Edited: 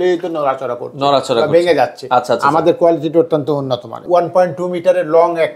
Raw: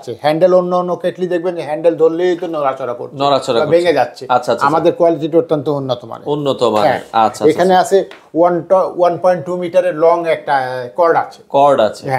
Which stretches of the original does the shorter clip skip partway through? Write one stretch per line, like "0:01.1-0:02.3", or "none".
0:06.2-0:08.9